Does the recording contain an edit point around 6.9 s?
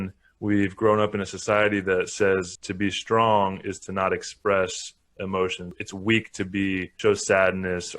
yes; 3 cuts; at 2.6 s, 5.7 s, 6.9 s

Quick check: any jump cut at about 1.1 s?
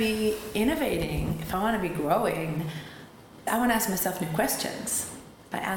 no; 1 cut; at 3.4 s

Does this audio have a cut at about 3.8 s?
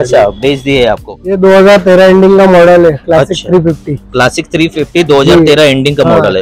no; 1 cut; at 1.1 s

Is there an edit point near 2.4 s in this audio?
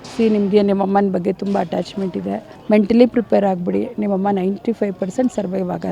no; 0 cuts

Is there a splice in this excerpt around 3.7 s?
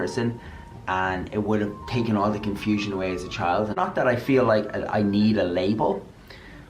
yes; 1 cut; at 3.7 s

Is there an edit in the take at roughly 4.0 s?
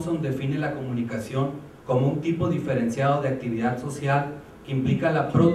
yes; 1 cut; at 4.0 s

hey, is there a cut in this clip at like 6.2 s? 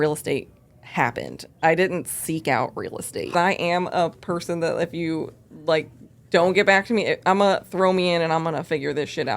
no; 1 cut; at 3.3 s

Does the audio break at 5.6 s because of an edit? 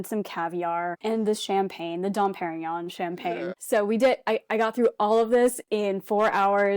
no; 2 cuts; at 1.0 s, 3.5 s

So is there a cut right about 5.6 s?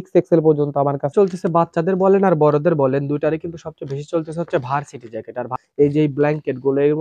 yes; 2 cuts; at 1.1 s, 5.6 s

